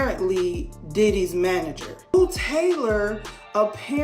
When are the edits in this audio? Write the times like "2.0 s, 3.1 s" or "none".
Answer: 2.1 s